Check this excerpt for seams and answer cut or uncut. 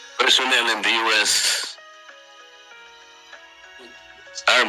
cut